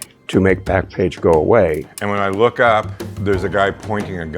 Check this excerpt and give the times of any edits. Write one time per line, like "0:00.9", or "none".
0:01.9
0:03.0